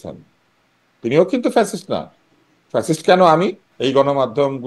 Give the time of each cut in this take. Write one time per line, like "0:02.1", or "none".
0:03.7